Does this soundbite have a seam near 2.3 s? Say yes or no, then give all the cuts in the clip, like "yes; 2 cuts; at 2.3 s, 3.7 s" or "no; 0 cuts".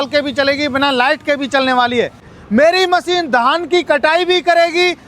yes; 1 cut; at 2.3 s